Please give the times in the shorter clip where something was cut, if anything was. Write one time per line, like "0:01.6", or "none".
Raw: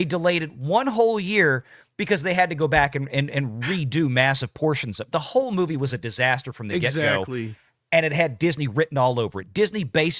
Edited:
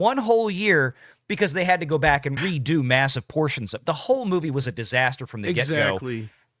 0:02.3